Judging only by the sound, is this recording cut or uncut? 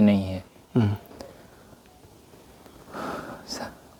uncut